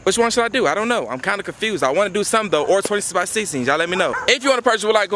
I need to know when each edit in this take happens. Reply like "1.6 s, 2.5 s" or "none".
4.2 s